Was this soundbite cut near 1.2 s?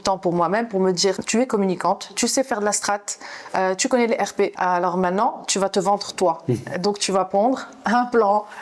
yes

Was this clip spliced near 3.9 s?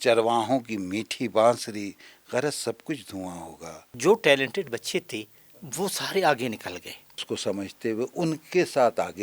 yes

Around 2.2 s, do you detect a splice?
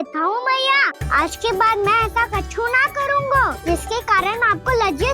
no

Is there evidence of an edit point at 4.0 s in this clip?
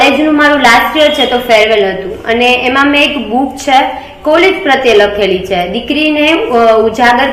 no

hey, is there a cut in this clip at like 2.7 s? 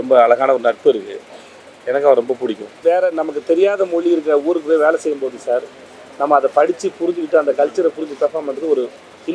yes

